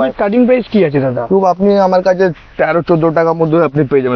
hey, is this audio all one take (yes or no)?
yes